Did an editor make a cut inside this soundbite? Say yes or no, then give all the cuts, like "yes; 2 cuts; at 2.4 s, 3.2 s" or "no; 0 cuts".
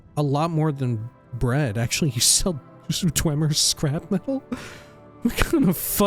no; 0 cuts